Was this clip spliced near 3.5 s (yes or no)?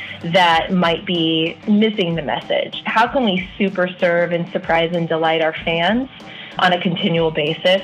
no